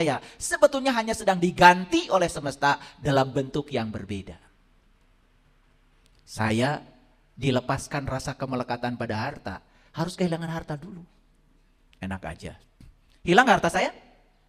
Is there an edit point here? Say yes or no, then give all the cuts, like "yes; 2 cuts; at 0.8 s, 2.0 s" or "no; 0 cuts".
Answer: no; 0 cuts